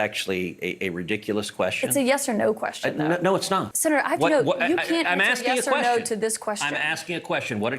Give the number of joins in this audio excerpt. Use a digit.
1